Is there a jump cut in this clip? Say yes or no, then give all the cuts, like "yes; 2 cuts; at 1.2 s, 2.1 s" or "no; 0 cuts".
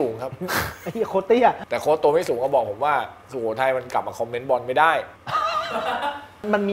yes; 2 cuts; at 1.6 s, 5.2 s